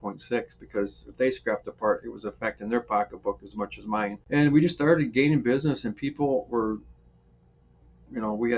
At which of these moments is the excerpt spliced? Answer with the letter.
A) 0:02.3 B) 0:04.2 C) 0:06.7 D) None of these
B